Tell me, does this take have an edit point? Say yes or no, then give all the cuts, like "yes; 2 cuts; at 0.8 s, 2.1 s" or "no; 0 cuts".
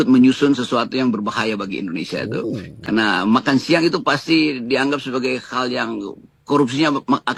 no; 0 cuts